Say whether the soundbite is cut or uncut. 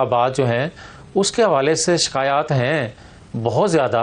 uncut